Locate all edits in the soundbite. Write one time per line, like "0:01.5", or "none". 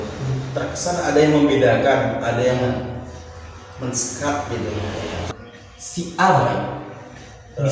0:05.3